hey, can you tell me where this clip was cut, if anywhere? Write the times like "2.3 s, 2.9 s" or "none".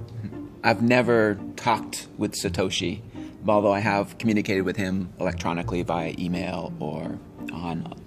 none